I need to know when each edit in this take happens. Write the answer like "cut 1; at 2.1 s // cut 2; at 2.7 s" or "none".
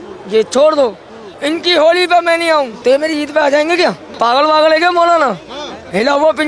cut 1; at 1.2 s // cut 2; at 2.7 s // cut 3; at 4.1 s